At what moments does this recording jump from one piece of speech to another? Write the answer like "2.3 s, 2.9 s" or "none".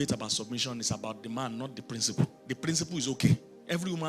2.4 s